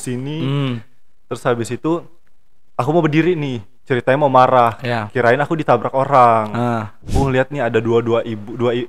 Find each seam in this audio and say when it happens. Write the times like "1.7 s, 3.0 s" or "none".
7.0 s